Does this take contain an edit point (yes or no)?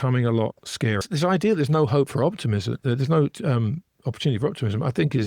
yes